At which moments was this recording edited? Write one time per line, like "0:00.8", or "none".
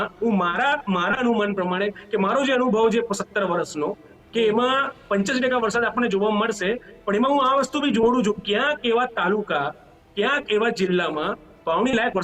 none